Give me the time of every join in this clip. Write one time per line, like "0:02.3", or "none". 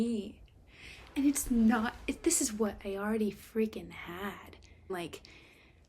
0:04.8